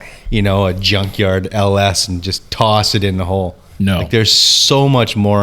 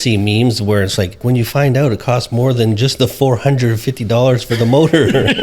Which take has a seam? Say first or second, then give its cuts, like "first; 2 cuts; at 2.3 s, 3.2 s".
second; 1 cut; at 1.2 s